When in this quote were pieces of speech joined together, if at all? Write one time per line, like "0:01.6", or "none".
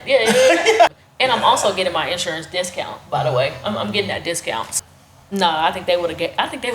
0:00.9
0:04.7